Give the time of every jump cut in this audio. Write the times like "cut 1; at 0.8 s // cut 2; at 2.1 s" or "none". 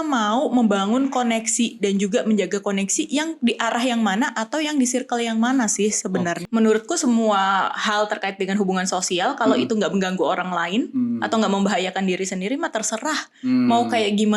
cut 1; at 6.4 s

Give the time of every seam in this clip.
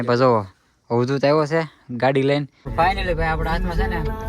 cut 1; at 2.9 s

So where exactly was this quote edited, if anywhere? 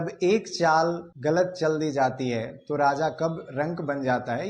cut 1; at 1.1 s

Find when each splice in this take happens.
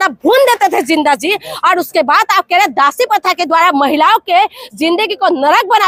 none

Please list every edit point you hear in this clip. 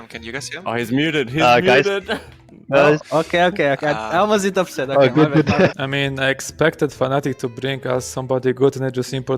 cut 1; at 5.7 s

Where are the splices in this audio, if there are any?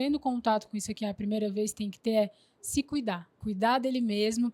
cut 1; at 3.3 s

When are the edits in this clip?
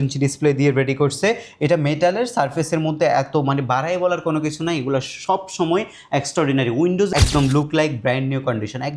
cut 1; at 7.1 s

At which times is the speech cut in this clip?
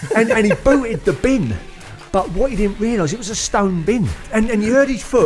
cut 1; at 4.2 s

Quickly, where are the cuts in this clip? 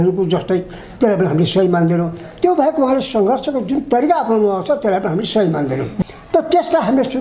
cut 1; at 5.9 s

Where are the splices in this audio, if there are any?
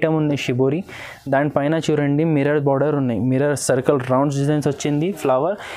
none

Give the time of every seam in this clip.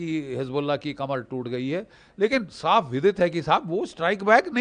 none

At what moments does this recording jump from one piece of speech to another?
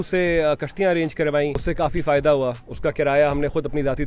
cut 1; at 1.6 s

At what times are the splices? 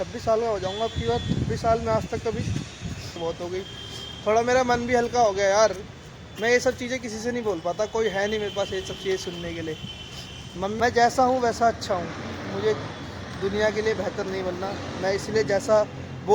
cut 1; at 3.1 s // cut 2; at 10.8 s

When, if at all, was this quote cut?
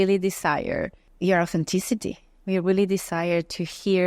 cut 1; at 1.0 s

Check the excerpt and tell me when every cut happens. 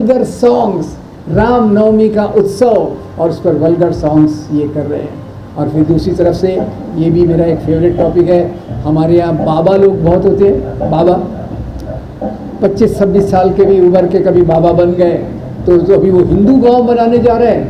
none

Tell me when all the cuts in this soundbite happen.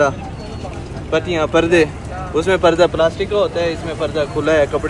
none

